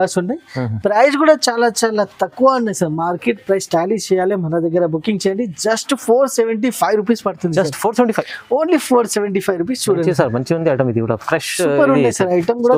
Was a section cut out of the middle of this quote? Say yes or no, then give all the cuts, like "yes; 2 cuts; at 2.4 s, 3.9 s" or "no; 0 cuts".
no; 0 cuts